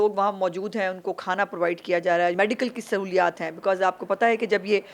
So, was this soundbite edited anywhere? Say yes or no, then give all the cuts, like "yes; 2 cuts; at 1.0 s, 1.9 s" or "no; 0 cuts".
yes; 1 cut; at 2.3 s